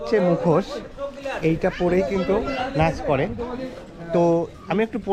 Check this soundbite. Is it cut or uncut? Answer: uncut